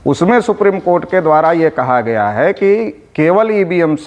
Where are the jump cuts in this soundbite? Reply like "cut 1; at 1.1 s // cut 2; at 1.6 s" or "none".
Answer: none